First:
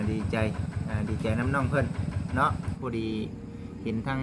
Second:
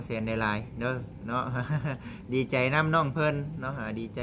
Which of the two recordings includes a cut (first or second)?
first